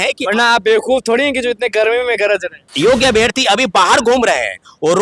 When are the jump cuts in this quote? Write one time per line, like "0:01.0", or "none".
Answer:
0:02.7

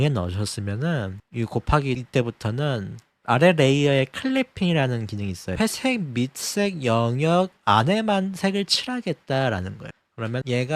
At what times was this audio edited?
0:05.6

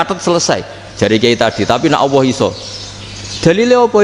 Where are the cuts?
none

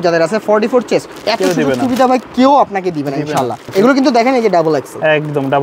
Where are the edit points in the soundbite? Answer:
0:01.1
0:03.6

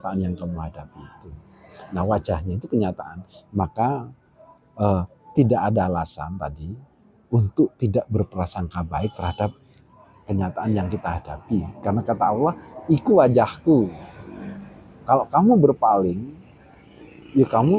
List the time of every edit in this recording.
none

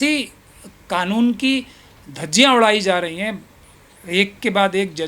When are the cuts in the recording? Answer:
none

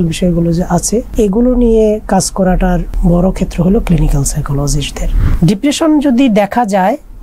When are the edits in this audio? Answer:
0:05.2

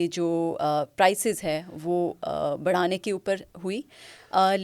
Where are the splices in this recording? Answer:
none

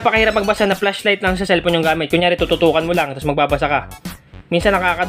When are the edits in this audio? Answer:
none

